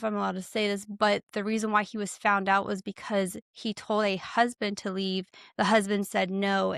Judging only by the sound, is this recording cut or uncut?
uncut